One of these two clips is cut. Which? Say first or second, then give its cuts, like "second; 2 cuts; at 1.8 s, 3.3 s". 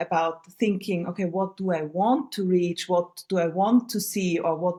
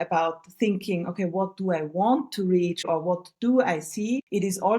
second; 1 cut; at 2.8 s